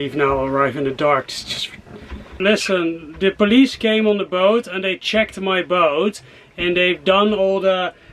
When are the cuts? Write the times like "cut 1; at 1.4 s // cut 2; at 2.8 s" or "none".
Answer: cut 1; at 2.4 s